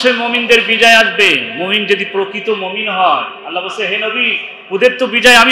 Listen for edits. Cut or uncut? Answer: uncut